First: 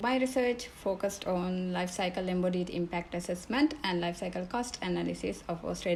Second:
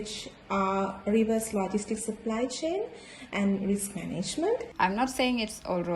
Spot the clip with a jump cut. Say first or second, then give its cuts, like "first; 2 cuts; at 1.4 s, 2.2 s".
second; 1 cut; at 4.7 s